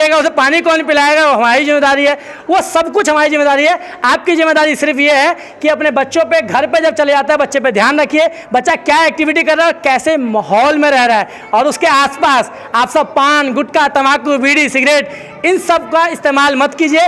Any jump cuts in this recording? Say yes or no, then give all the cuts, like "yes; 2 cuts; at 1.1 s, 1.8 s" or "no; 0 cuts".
no; 0 cuts